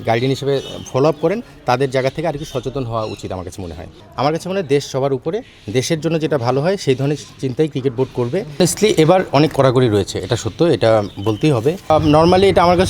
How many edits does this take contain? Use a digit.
3